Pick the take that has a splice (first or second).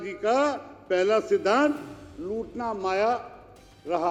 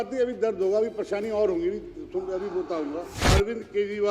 second